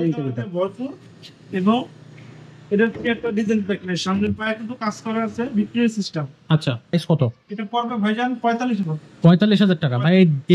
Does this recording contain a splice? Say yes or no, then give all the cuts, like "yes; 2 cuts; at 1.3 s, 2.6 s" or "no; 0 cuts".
yes; 1 cut; at 6.9 s